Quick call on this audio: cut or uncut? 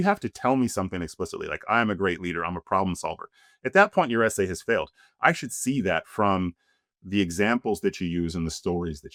uncut